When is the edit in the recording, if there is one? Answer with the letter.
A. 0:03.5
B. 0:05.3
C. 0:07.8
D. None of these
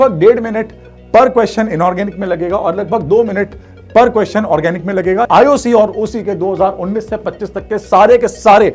B